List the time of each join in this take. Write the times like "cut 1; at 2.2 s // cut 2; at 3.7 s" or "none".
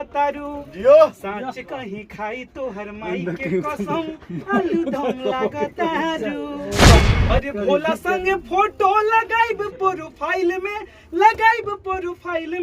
cut 1; at 7.0 s